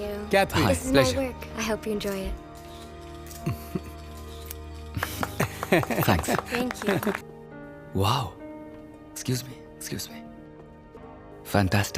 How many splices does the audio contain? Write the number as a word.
two